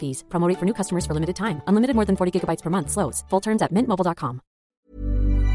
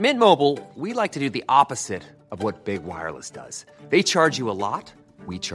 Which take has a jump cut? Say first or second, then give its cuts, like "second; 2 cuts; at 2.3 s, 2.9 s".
first; 1 cut; at 4.6 s